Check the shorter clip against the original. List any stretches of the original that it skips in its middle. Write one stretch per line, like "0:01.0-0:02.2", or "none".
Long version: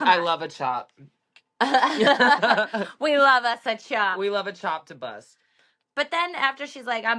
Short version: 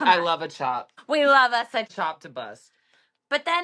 0:00.9-0:02.9
0:03.8-0:04.6